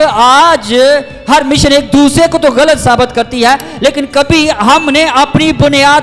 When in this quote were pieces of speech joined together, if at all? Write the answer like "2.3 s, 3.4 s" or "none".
none

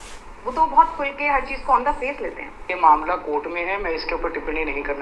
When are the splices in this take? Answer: 2.6 s

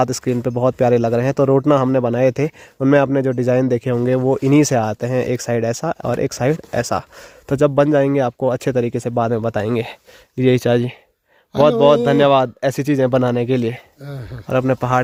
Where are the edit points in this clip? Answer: none

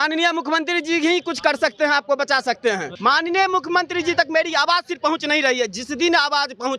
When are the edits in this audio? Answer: 2.9 s

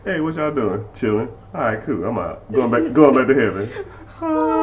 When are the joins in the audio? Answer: none

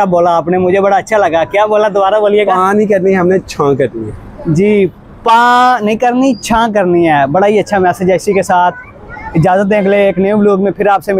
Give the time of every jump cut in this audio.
none

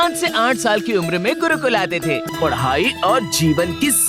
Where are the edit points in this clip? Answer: 2.3 s

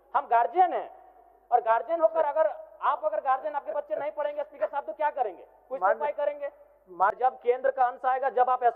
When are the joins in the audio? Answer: 7.1 s

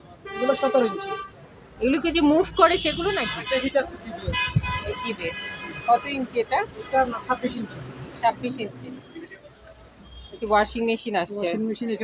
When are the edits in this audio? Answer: 3.3 s, 9.2 s

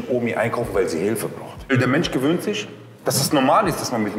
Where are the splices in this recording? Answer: 1.7 s

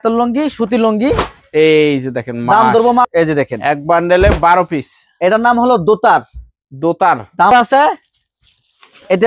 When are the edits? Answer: 3.1 s, 7.5 s

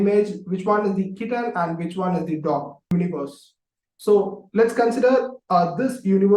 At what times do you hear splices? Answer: 2.9 s

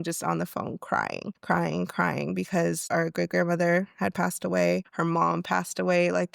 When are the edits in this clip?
1.3 s, 2.8 s, 4.9 s

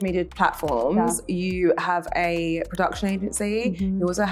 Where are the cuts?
none

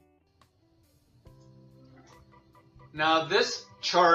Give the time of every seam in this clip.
none

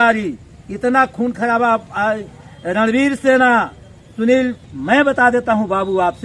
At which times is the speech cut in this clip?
4.6 s

